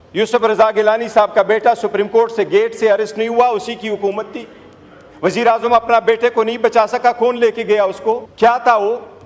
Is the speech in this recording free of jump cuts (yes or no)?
no